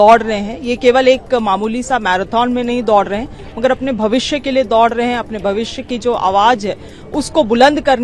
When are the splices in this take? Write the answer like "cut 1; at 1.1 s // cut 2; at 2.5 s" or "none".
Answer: none

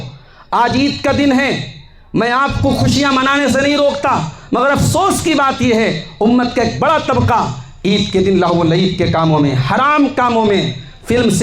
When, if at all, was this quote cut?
none

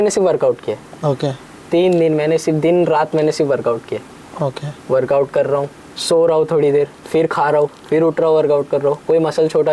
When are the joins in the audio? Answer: none

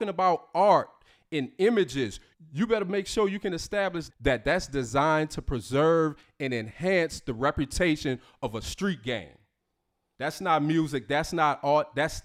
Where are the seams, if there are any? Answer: none

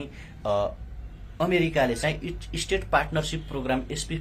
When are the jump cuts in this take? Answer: none

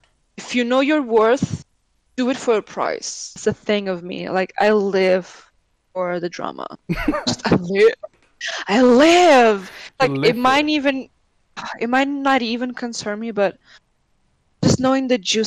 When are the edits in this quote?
cut 1; at 3.4 s

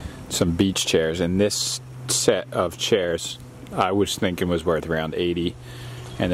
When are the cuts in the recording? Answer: none

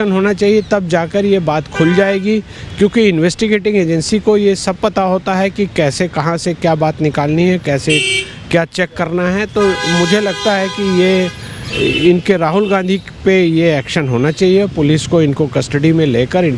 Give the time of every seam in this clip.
none

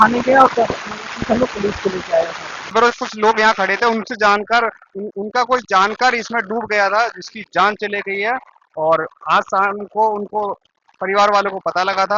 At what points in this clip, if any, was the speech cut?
cut 1; at 2.7 s

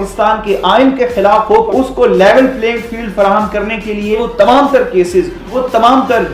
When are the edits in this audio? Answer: cut 1; at 1.7 s // cut 2; at 4.2 s // cut 3; at 5.4 s

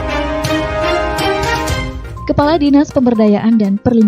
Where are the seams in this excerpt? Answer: cut 1; at 2.0 s

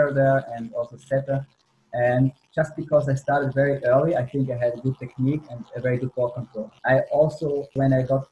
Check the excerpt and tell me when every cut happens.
cut 1; at 6.6 s

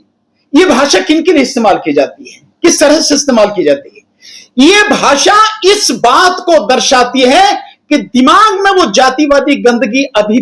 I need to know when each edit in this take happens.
none

